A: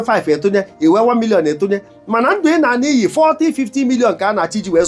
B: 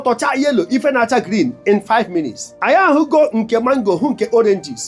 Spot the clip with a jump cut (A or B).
B